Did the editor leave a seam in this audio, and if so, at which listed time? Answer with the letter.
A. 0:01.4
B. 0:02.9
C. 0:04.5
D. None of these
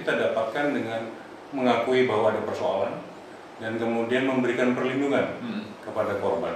D